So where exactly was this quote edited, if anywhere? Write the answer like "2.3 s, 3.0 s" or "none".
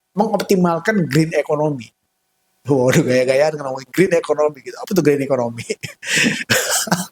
none

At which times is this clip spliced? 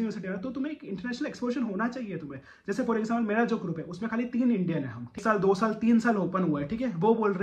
5.2 s

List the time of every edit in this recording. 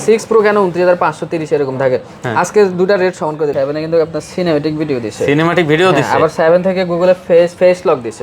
3.5 s

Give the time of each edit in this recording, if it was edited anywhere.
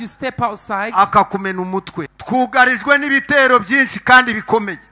2.0 s

